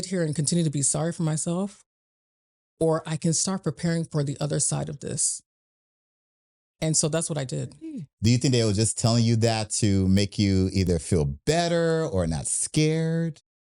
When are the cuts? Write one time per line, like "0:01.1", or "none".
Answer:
0:08.1